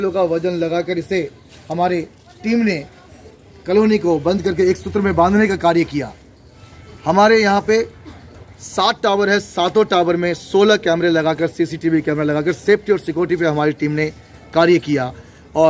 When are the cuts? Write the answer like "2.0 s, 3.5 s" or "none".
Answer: none

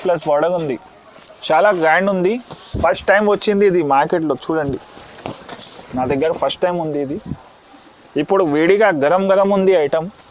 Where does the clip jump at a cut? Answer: none

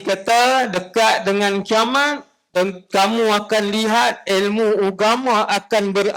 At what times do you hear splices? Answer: none

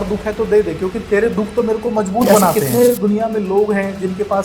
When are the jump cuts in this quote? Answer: 2.5 s

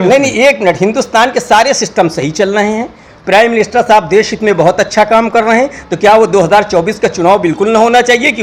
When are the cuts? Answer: none

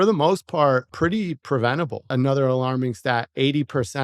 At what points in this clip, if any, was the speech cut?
0.9 s, 2.1 s

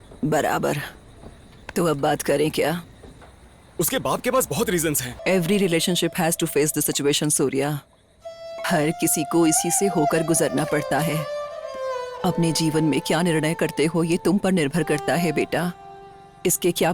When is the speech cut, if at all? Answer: 5.1 s, 11.6 s

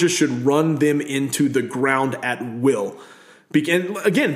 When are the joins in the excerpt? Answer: none

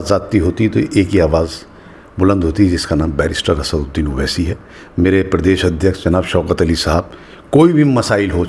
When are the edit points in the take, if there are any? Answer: none

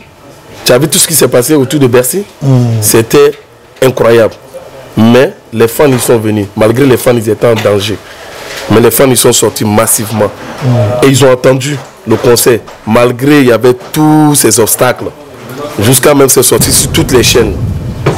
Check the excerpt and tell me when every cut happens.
none

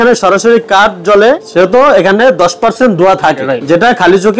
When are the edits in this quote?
1.4 s, 3.5 s

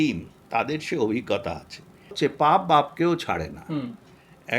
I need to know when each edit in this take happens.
2.1 s

